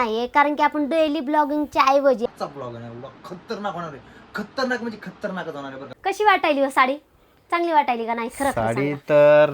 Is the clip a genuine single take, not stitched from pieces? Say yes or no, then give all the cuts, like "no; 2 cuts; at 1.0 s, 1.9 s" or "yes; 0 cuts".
no; 2 cuts; at 2.3 s, 5.9 s